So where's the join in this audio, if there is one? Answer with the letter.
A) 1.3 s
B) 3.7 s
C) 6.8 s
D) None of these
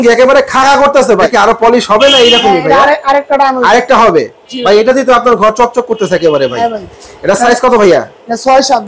A